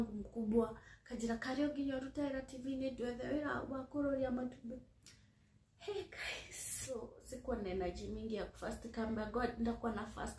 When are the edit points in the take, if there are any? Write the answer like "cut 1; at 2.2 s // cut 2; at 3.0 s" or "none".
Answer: cut 1; at 7.2 s